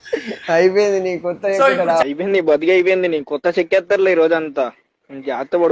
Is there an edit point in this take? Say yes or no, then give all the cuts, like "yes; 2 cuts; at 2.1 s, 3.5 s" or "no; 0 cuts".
no; 0 cuts